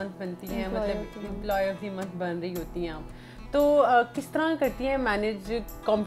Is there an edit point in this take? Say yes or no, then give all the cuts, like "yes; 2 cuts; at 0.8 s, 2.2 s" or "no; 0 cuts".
no; 0 cuts